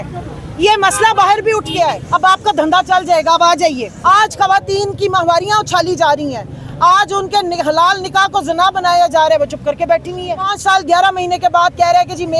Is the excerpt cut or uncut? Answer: cut